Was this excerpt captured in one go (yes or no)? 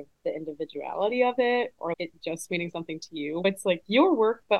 yes